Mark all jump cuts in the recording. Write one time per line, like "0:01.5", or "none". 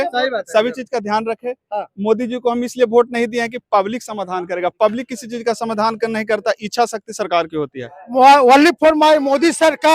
0:08.0